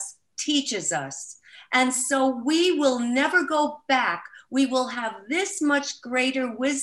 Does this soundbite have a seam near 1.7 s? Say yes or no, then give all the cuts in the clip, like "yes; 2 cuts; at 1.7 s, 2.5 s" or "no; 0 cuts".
no; 0 cuts